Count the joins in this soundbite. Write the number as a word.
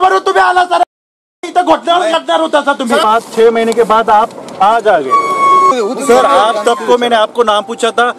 two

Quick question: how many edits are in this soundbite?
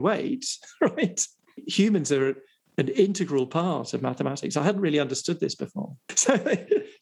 two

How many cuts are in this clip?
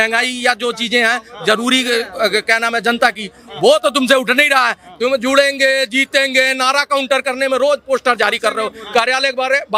zero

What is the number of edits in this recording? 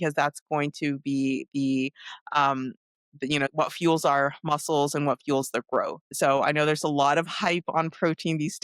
zero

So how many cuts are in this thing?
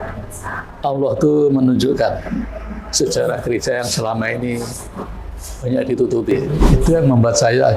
one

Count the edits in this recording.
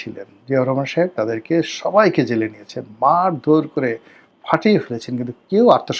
zero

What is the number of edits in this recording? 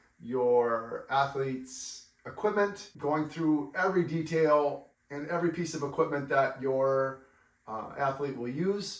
two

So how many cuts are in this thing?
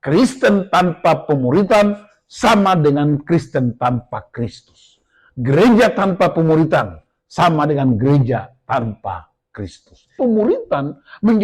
one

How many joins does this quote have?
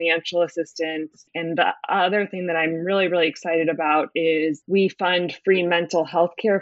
two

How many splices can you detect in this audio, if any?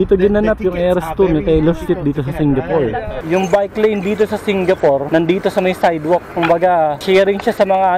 three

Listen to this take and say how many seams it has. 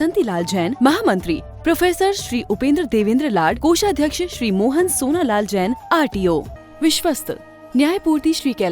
one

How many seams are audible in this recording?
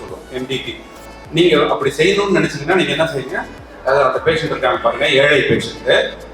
one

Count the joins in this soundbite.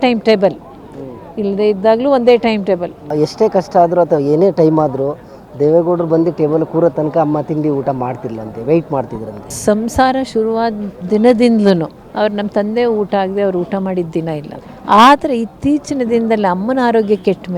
four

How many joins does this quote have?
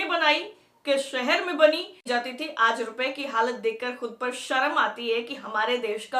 one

